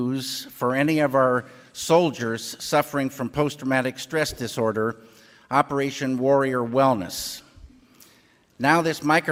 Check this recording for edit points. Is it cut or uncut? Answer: uncut